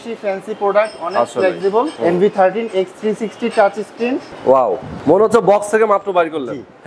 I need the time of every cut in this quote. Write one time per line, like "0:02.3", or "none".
0:01.9
0:04.3
0:04.9